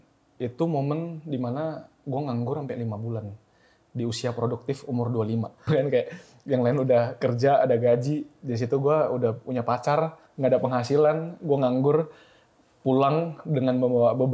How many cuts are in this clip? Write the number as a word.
one